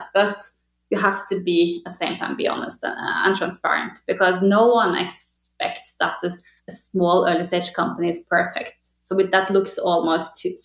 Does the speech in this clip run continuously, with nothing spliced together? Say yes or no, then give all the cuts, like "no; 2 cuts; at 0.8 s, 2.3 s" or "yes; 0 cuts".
yes; 0 cuts